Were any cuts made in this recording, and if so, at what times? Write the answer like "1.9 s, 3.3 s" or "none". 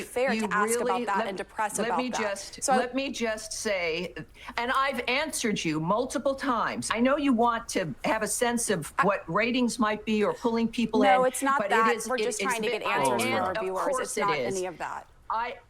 6.9 s

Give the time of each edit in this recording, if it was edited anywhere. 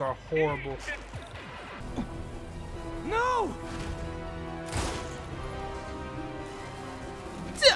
1.8 s

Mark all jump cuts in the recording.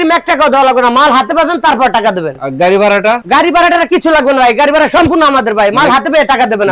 none

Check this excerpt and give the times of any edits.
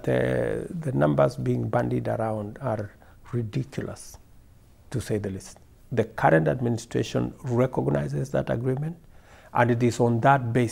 5.6 s

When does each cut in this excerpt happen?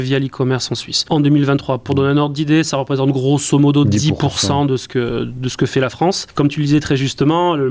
1.0 s, 6.2 s

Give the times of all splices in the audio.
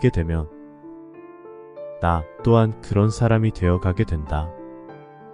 4.4 s

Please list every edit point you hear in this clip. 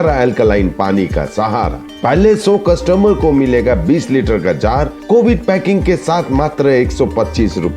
none

